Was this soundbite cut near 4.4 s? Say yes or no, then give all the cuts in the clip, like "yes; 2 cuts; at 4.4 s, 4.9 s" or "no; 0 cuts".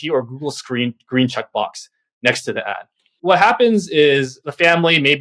yes; 2 cuts; at 3.1 s, 4.4 s